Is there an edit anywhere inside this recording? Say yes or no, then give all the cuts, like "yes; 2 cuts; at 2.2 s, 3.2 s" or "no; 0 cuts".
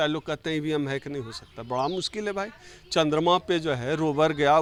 no; 0 cuts